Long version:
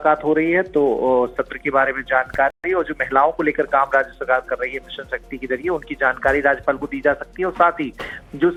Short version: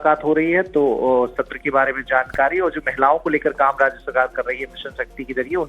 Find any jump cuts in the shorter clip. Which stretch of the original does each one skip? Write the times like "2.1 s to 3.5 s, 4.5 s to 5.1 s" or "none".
2.5 s to 2.7 s